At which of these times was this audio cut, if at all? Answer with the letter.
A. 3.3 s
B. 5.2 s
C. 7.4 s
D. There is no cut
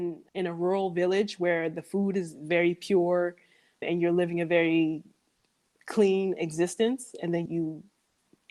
C